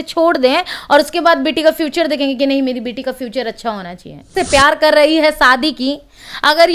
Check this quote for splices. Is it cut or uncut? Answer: cut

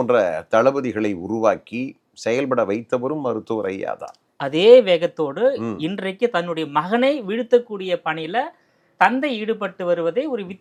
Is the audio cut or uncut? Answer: uncut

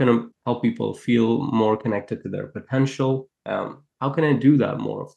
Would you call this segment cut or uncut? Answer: uncut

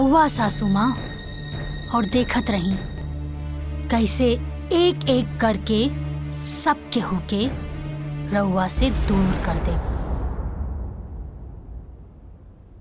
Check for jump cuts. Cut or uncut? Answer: uncut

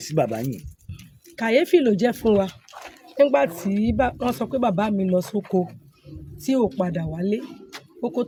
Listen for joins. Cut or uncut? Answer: uncut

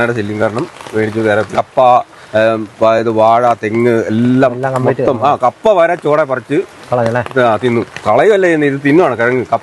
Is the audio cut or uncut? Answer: cut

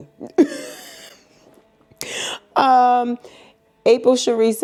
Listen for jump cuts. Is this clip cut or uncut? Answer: uncut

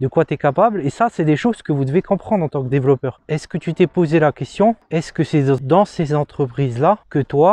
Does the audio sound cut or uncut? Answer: cut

